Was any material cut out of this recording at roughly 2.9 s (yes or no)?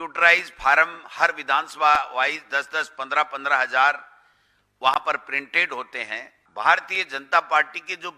no